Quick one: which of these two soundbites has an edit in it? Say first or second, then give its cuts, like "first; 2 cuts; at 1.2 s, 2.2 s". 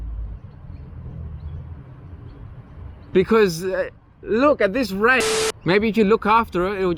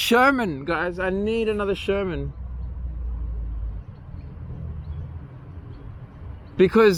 first; 1 cut; at 5.2 s